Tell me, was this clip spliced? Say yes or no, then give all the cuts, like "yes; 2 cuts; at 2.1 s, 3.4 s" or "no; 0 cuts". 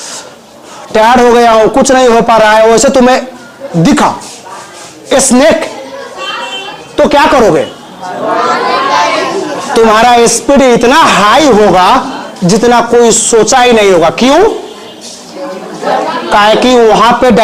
no; 0 cuts